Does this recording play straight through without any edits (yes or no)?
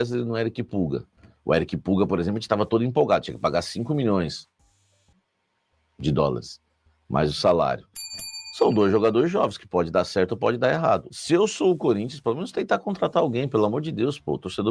no